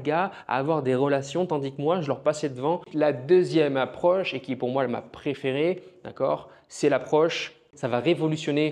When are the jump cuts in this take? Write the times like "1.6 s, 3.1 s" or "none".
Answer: 2.9 s, 7.7 s